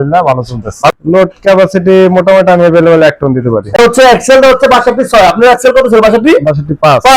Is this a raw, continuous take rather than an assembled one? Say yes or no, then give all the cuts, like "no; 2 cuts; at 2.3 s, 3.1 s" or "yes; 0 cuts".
no; 2 cuts; at 0.9 s, 3.8 s